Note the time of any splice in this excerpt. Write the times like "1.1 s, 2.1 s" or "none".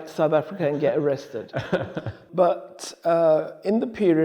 none